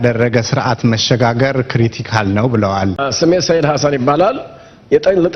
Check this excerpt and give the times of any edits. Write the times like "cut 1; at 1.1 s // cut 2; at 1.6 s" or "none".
cut 1; at 3.0 s